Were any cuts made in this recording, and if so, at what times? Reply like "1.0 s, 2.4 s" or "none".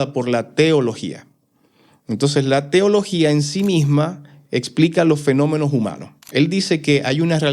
6.2 s